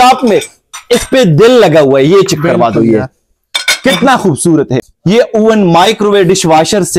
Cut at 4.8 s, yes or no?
yes